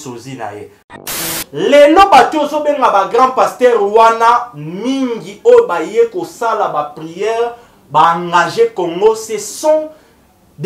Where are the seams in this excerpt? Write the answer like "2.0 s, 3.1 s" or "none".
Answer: 1.2 s